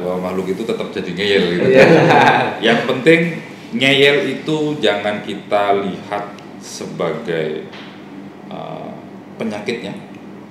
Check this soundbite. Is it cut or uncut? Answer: uncut